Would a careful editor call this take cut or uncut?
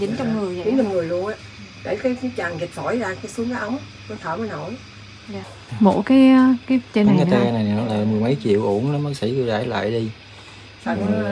cut